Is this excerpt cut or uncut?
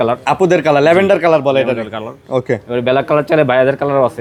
uncut